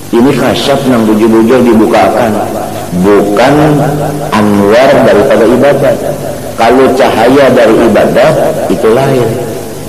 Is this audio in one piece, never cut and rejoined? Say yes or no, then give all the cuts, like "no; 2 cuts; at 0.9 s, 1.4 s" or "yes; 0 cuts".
yes; 0 cuts